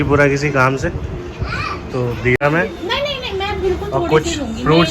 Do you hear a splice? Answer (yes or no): yes